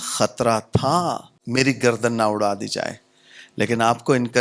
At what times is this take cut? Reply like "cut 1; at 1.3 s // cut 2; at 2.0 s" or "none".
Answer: cut 1; at 1.3 s

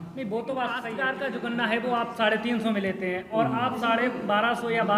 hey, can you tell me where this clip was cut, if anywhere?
cut 1; at 1.0 s

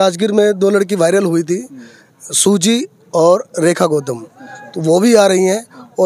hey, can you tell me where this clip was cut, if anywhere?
none

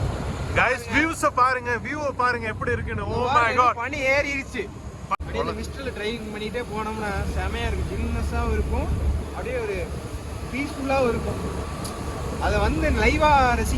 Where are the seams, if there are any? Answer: cut 1; at 5.2 s

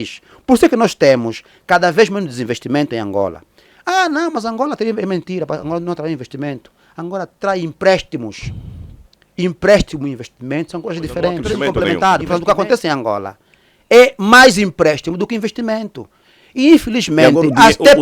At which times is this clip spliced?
cut 1; at 11.4 s

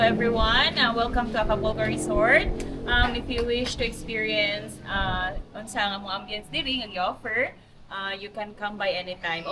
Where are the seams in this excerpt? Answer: none

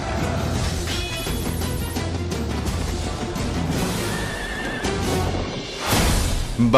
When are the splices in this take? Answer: cut 1; at 2.3 s

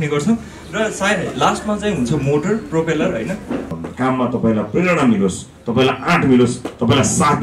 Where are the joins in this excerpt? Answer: cut 1; at 3.8 s

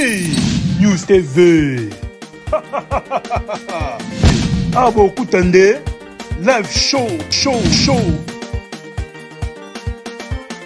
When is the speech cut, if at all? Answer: none

